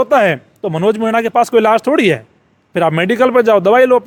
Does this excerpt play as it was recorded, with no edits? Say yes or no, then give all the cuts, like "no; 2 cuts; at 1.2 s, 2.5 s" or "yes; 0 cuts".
yes; 0 cuts